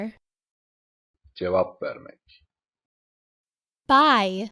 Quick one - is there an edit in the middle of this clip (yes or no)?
yes